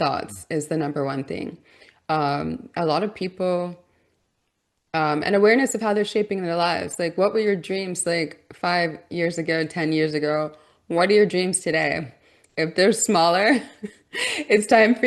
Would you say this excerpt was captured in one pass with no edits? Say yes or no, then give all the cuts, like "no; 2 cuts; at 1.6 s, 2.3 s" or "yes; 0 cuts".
yes; 0 cuts